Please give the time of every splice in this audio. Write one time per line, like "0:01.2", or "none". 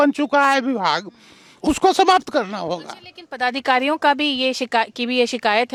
none